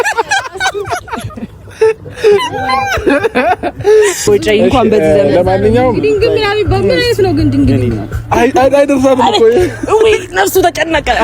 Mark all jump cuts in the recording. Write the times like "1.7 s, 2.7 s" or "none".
4.2 s

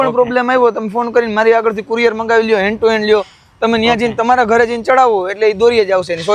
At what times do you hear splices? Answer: none

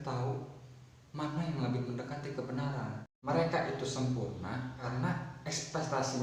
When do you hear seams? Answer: 3.1 s, 4.8 s

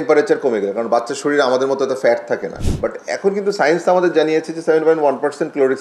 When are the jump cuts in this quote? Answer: 2.6 s

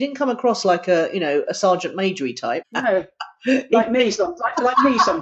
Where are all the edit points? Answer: 2.7 s

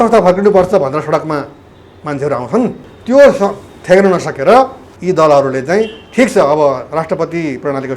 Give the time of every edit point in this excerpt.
2.9 s, 4.9 s

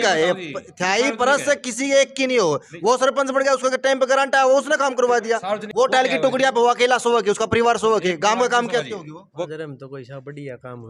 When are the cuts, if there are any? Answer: 5.7 s, 9.2 s

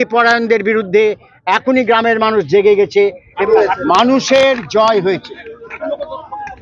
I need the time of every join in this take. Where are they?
3.3 s

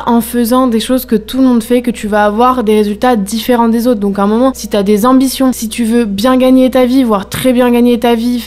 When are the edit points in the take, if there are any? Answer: none

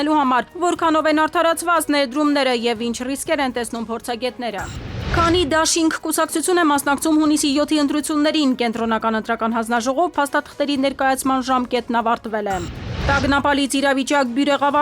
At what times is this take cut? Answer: 5.1 s

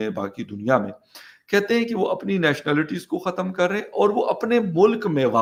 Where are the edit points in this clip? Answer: none

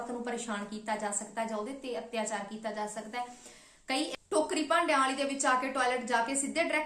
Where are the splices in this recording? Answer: 4.1 s

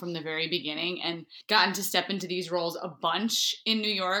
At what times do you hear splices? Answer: 1.3 s

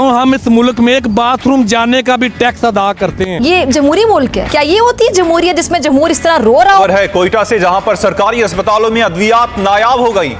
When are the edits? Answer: none

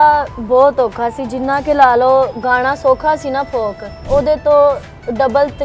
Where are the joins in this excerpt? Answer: 4.0 s

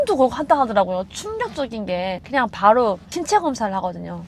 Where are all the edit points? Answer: 2.2 s

